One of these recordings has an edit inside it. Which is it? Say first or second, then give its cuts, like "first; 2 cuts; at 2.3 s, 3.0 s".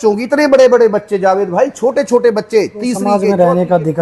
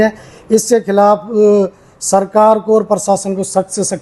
first; 1 cut; at 3.1 s